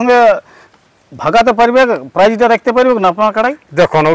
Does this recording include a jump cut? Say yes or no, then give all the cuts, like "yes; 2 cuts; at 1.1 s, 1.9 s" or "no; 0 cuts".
no; 0 cuts